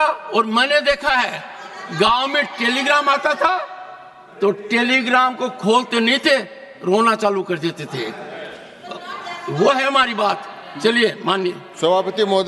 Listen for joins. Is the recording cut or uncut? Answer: uncut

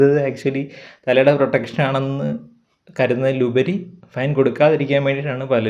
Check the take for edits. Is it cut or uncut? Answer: uncut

